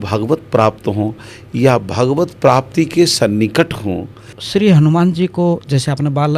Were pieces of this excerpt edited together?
yes; 1 cut; at 4.4 s

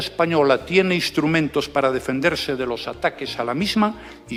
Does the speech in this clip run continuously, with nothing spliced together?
yes; 0 cuts

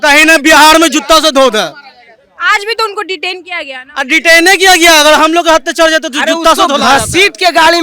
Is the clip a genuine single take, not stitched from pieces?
yes; 0 cuts

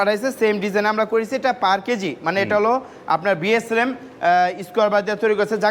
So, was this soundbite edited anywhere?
no; 0 cuts

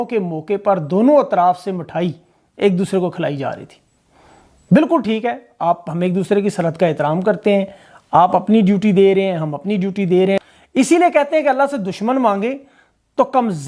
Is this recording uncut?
no; 1 cut; at 10.4 s

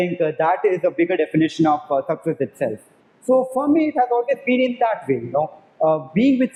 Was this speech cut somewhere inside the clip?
no; 0 cuts

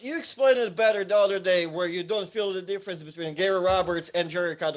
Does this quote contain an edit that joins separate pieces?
no; 0 cuts

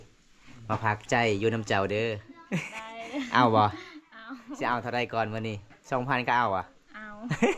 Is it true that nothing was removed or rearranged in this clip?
yes; 0 cuts

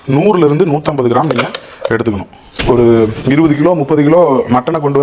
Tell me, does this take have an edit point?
yes; 1 cut; at 2.4 s

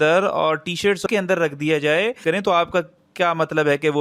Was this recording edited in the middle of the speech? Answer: yes; 2 cuts; at 1.0 s, 2.2 s

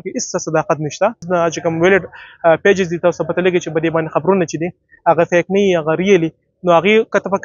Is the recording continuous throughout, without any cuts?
no; 1 cut; at 1.2 s

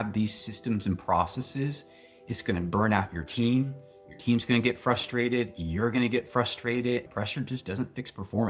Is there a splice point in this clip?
yes; 1 cut; at 7.1 s

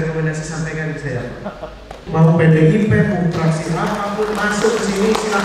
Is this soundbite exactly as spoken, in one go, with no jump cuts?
no; 1 cut; at 2.0 s

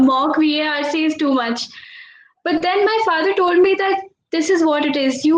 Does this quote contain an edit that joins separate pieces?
no; 0 cuts

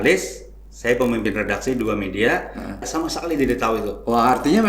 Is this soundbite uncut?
no; 1 cut; at 2.9 s

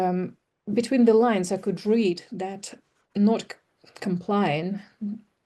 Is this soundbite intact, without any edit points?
yes; 0 cuts

